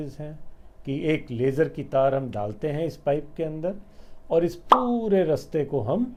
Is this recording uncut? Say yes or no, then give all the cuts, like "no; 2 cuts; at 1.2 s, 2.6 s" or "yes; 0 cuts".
yes; 0 cuts